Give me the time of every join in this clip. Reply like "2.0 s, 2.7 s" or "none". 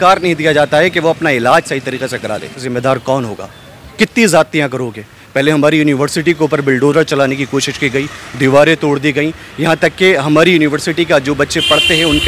2.7 s